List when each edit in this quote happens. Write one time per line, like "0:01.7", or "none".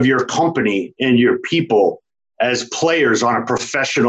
none